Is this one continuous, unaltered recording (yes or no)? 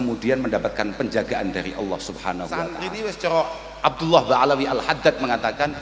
no